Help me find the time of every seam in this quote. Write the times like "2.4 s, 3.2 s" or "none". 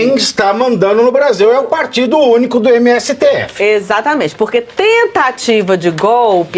none